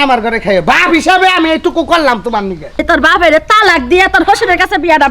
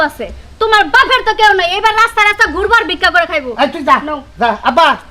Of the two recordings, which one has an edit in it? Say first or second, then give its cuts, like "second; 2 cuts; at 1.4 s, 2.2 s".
first; 1 cut; at 2.8 s